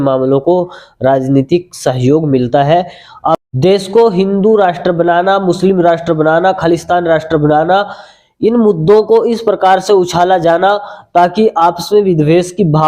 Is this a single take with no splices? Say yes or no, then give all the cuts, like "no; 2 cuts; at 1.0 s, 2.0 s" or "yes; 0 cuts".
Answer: no; 1 cut; at 3.4 s